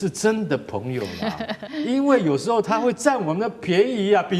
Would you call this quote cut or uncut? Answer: cut